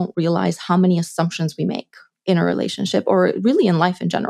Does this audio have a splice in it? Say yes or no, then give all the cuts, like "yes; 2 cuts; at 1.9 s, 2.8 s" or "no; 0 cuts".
no; 0 cuts